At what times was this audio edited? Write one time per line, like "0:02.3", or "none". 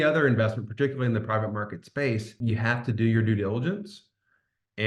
0:02.3

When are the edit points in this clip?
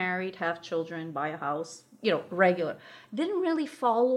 none

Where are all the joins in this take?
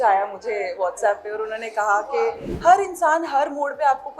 0:02.5

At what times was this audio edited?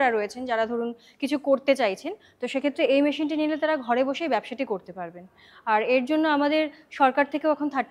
none

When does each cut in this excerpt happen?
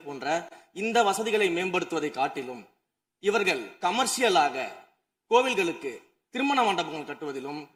none

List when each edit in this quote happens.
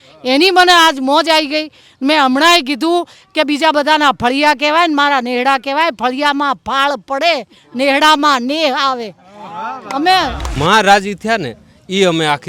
0:10.6

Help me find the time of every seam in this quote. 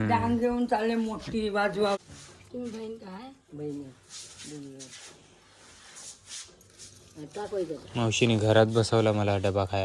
0:02.0

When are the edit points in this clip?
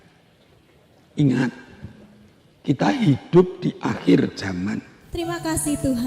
0:05.0

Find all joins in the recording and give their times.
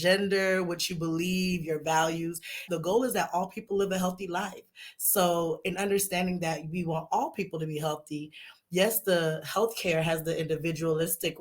0:02.6

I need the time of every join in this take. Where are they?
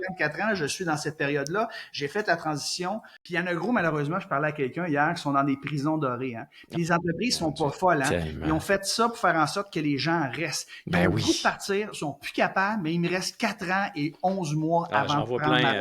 0:03.1

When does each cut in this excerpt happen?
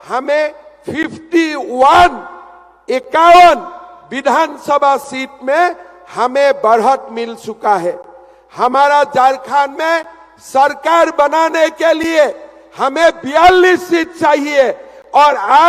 none

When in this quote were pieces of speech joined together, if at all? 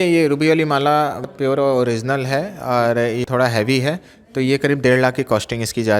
0:01.3
0:03.2

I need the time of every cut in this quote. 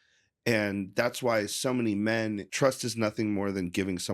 0:02.5

